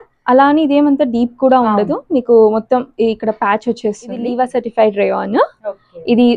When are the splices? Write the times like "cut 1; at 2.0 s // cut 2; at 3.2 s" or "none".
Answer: cut 1; at 4.3 s